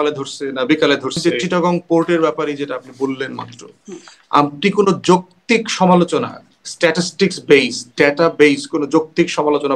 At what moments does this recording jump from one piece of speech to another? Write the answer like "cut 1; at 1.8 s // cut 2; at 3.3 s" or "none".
cut 1; at 1.2 s